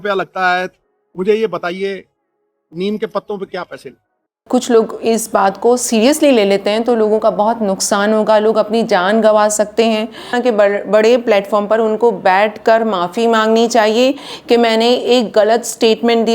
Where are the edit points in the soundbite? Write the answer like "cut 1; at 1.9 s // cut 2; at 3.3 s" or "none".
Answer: cut 1; at 4.4 s // cut 2; at 10.3 s